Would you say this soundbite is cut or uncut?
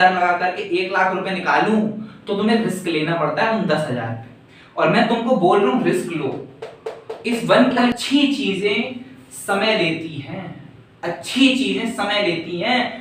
cut